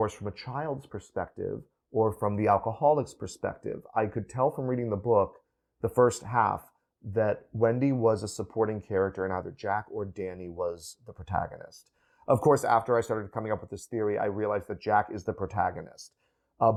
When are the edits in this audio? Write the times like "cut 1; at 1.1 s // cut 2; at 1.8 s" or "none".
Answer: none